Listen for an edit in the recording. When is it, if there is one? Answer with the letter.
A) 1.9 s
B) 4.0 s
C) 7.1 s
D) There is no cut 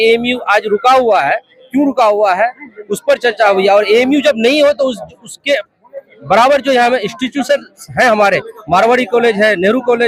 D